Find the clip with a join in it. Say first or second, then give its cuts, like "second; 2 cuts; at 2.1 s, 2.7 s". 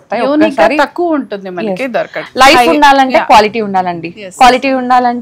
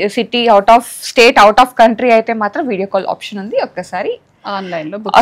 first; 1 cut; at 2.2 s